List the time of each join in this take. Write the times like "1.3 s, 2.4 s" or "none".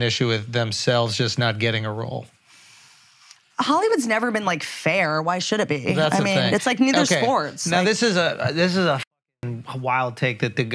none